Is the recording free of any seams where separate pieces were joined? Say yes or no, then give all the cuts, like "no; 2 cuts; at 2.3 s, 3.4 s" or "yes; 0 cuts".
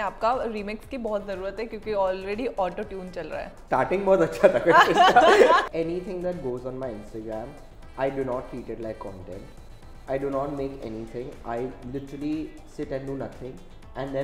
no; 2 cuts; at 3.5 s, 5.7 s